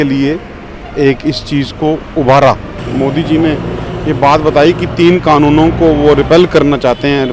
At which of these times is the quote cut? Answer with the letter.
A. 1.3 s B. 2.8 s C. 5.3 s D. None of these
B